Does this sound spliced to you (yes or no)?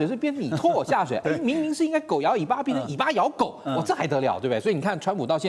no